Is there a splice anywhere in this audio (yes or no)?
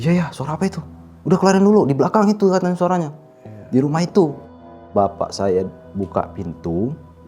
no